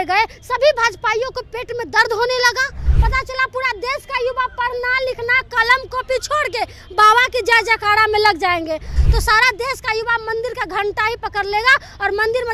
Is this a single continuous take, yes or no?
no